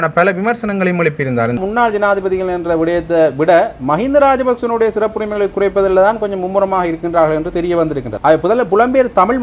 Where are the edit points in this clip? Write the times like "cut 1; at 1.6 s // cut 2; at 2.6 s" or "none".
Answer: cut 1; at 1.6 s // cut 2; at 8.1 s